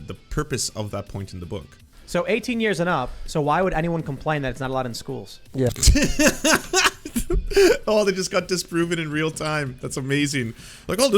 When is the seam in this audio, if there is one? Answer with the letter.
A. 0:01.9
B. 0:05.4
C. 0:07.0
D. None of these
A